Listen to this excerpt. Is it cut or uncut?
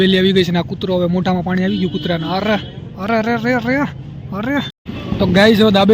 cut